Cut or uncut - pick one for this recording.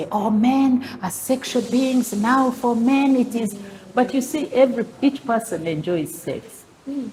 uncut